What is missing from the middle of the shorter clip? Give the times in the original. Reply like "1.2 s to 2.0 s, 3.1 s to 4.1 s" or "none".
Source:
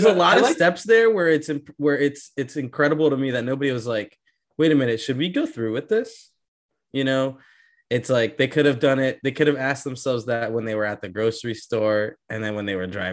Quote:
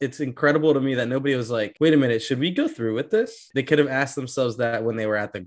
4.1 s to 4.5 s, 6.3 s to 9.2 s